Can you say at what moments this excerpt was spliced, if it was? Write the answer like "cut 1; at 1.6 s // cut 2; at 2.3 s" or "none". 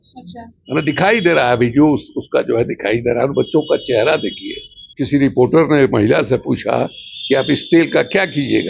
cut 1; at 4.9 s